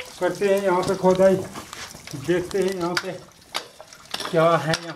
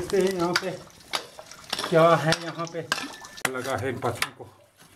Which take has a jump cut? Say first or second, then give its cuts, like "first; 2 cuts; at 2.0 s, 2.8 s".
second; 1 cut; at 3.5 s